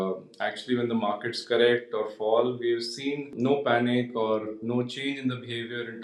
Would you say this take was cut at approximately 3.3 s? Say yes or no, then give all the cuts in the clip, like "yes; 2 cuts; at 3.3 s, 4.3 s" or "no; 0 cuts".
yes; 1 cut; at 3.3 s